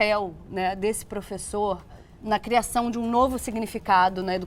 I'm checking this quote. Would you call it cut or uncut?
cut